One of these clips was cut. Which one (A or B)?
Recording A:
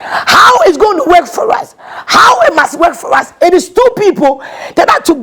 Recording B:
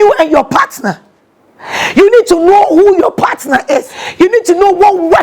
B